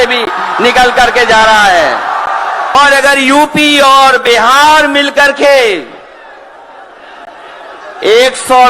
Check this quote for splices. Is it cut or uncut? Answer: cut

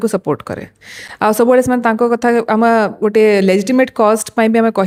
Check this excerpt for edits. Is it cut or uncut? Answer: uncut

